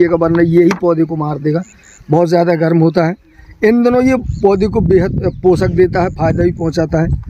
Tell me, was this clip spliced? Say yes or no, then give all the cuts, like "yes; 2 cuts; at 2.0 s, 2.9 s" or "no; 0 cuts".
no; 0 cuts